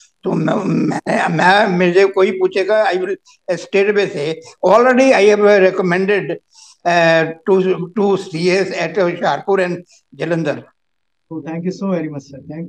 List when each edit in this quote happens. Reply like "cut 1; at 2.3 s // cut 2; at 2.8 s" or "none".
none